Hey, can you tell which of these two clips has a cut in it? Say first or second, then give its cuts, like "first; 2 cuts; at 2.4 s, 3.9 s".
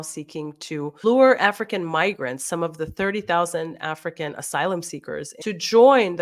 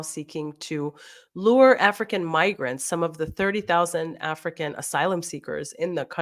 first; 2 cuts; at 1.0 s, 5.3 s